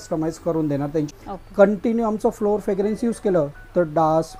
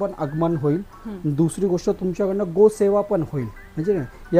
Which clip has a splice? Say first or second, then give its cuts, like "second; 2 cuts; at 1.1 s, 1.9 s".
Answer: first; 1 cut; at 1.1 s